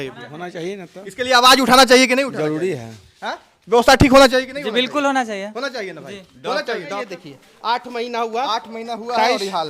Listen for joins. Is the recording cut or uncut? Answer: cut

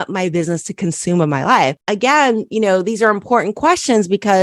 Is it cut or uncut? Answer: cut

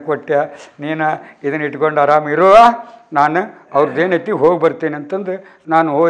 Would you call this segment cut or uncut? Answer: uncut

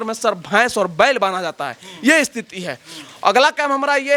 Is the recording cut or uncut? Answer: uncut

